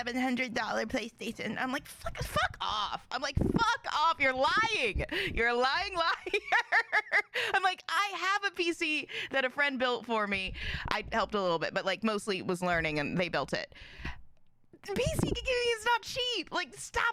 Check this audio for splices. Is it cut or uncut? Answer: uncut